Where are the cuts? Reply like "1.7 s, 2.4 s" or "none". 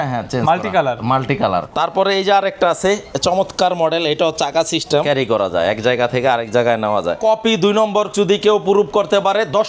1.7 s, 5.0 s, 7.2 s